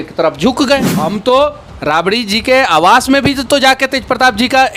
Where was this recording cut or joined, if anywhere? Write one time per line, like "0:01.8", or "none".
0:00.9